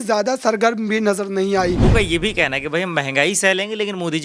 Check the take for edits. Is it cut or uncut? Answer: cut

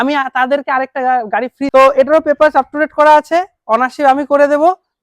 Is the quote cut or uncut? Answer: cut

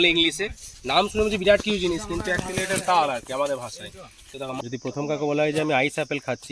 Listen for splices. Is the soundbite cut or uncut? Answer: cut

